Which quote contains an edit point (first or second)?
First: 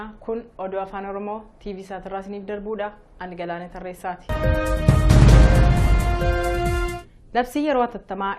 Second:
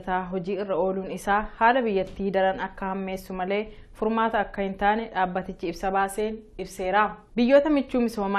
second